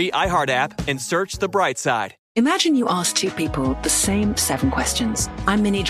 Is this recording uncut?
yes; 0 cuts

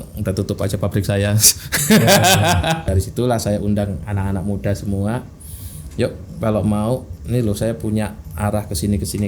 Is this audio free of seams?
no; 1 cut; at 2.8 s

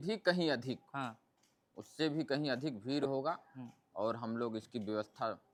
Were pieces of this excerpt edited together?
no; 0 cuts

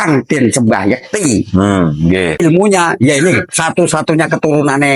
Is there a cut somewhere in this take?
yes; 1 cut; at 2.4 s

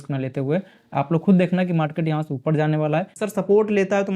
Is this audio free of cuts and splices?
no; 1 cut; at 3.2 s

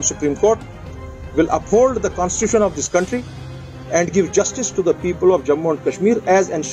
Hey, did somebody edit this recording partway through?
no; 0 cuts

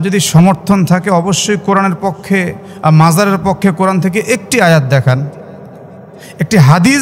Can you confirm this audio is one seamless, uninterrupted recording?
yes; 0 cuts

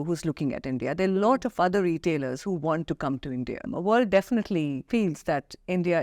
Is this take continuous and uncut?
no; 2 cuts; at 3.7 s, 4.8 s

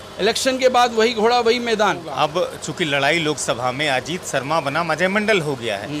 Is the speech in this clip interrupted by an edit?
yes; 1 cut; at 2.1 s

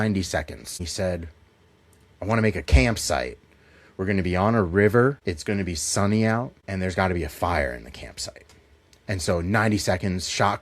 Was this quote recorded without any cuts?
no; 3 cuts; at 0.8 s, 5.2 s, 6.6 s

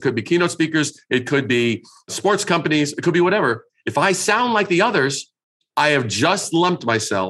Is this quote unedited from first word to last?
yes; 0 cuts

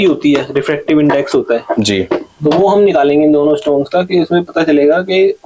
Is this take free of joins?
yes; 0 cuts

